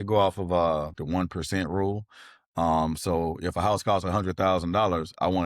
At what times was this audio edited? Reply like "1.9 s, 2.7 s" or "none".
1.0 s